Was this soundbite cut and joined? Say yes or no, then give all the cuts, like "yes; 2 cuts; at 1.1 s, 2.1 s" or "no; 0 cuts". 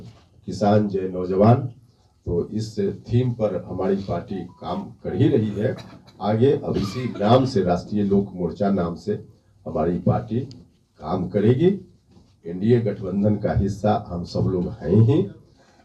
no; 0 cuts